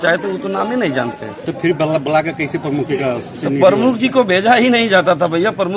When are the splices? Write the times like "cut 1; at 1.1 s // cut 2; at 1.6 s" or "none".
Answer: none